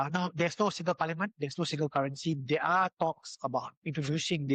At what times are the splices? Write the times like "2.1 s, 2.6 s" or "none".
none